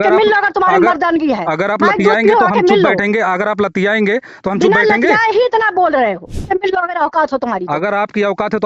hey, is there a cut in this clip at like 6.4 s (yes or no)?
yes